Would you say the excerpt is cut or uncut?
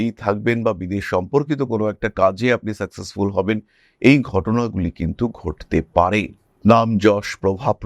uncut